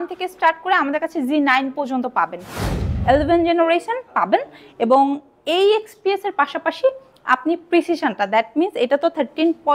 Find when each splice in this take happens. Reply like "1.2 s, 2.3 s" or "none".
2.7 s